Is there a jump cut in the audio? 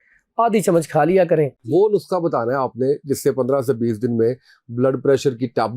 yes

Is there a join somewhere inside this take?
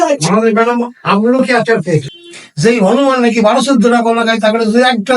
yes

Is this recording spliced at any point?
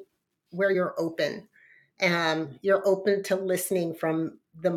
no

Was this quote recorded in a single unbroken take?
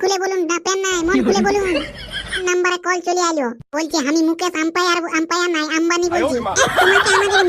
no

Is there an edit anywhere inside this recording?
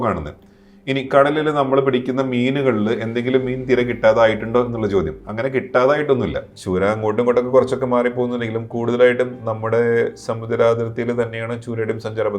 yes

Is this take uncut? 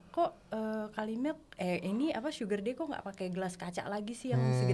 yes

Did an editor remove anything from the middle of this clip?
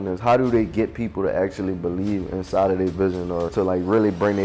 yes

